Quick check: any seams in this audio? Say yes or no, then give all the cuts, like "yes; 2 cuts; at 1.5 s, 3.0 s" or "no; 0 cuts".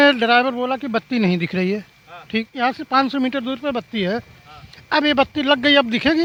no; 0 cuts